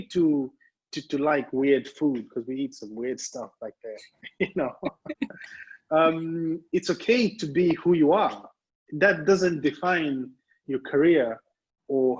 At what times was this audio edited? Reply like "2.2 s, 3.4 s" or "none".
none